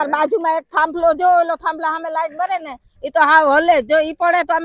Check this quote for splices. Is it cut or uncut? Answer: uncut